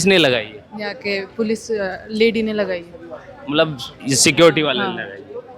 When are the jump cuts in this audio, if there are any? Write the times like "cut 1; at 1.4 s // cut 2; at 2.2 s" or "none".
none